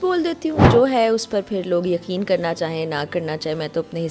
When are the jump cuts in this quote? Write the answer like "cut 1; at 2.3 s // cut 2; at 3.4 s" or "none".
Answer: none